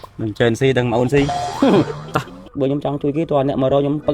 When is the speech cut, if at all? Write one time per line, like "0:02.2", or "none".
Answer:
0:02.4